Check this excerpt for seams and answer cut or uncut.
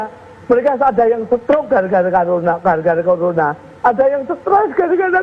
uncut